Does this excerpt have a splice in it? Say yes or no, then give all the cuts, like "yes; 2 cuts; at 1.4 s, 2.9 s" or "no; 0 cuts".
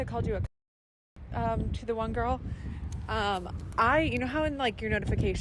no; 0 cuts